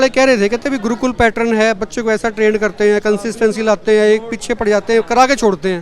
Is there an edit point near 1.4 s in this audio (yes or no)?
no